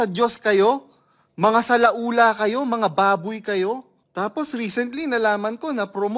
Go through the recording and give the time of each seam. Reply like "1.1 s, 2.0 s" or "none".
none